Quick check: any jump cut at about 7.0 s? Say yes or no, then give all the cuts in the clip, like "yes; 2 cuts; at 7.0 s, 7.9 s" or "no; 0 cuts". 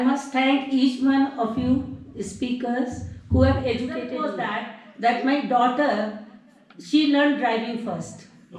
no; 1 cut; at 4.2 s